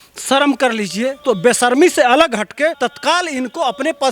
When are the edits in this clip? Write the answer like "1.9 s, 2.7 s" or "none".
1.2 s, 2.8 s